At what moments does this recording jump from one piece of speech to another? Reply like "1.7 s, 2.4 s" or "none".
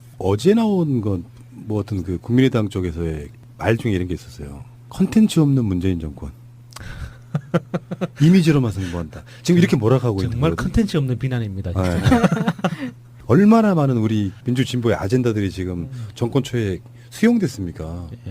10.1 s